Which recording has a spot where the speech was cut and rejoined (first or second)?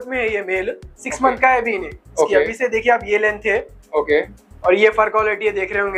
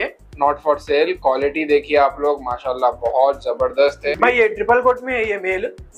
second